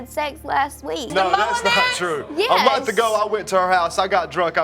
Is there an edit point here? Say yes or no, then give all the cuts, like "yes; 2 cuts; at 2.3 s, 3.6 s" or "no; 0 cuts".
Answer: yes; 1 cut; at 1.1 s